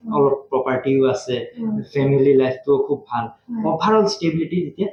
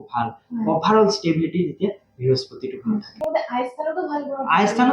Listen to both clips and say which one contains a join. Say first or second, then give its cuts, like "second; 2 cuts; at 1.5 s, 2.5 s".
second; 1 cut; at 3.2 s